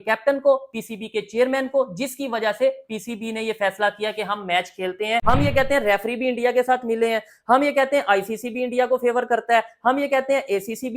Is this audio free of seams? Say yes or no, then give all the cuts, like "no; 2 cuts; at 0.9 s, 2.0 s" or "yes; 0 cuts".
no; 1 cut; at 5.2 s